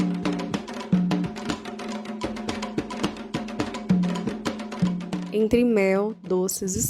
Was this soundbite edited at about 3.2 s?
no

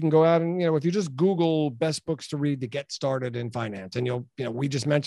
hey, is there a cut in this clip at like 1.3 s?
no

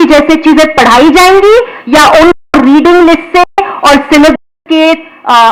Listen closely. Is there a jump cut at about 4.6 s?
no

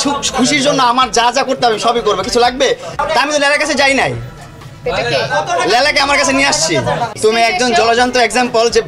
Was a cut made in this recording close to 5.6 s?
no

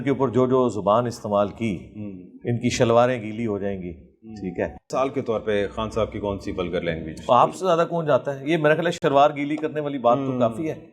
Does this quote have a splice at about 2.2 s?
no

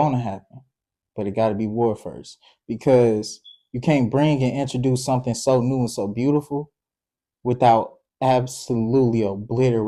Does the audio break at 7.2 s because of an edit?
no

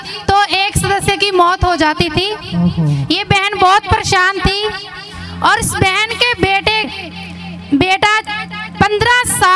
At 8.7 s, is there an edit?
no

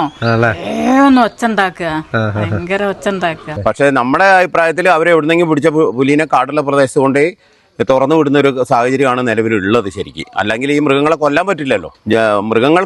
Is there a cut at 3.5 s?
yes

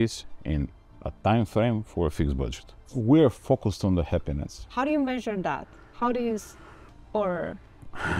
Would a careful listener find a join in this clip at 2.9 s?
yes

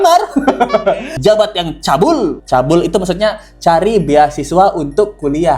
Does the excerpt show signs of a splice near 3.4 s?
no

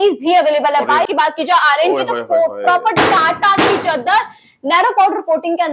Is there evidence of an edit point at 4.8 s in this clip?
no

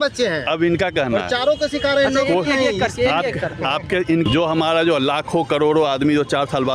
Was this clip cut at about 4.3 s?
yes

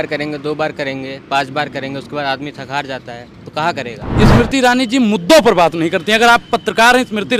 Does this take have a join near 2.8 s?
no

